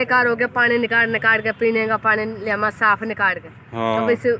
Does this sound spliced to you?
no; 0 cuts

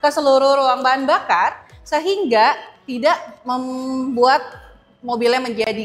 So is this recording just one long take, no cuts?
yes; 0 cuts

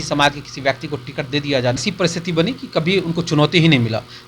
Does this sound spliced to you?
yes; 1 cut; at 1.8 s

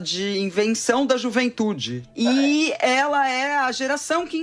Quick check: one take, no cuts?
no; 1 cut; at 1.9 s

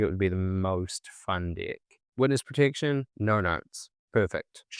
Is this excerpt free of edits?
no; 1 cut; at 2.0 s

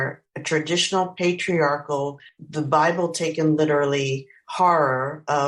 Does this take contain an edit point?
no; 0 cuts

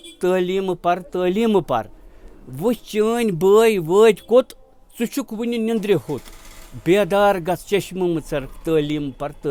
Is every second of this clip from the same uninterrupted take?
yes; 0 cuts

